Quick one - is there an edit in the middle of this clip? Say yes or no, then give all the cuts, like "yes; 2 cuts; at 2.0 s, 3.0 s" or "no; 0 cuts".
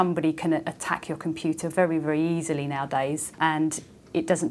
yes; 1 cut; at 3.4 s